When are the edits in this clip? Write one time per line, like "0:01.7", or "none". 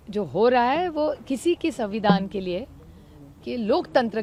none